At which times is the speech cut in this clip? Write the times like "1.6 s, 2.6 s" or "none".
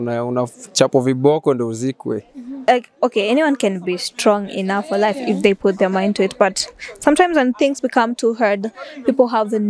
2.7 s